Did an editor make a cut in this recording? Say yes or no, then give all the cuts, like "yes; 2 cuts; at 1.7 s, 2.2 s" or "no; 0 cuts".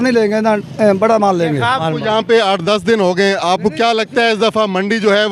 yes; 1 cut; at 1.9 s